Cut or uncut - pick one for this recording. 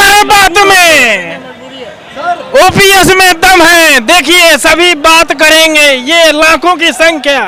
uncut